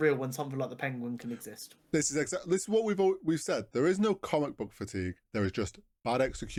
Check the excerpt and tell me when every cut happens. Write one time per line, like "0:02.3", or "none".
none